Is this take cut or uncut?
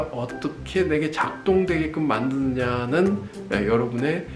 uncut